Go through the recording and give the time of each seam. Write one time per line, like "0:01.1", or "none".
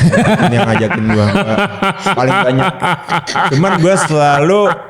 none